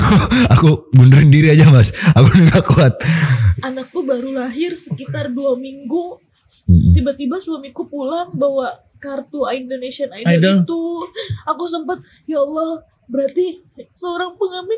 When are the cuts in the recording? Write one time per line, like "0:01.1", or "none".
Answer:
0:03.5
0:12.1
0:13.8